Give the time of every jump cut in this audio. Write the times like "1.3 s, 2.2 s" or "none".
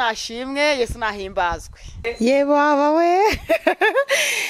2.1 s